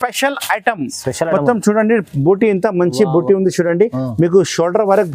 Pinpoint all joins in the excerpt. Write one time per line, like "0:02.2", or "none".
none